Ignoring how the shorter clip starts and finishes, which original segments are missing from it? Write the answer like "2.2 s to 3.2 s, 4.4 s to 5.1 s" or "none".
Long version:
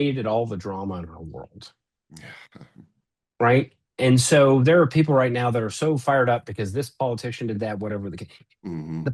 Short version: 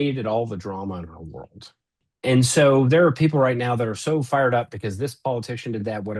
2.1 s to 3.8 s